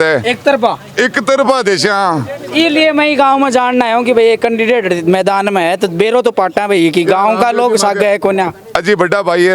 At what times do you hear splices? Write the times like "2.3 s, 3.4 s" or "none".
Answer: none